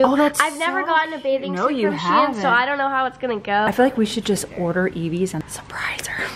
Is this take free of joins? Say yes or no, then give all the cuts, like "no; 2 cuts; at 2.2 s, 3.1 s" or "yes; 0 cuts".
no; 2 cuts; at 3.7 s, 5.4 s